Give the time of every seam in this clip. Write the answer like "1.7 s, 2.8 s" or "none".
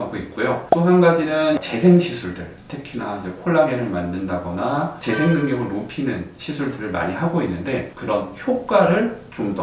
1.6 s, 5.0 s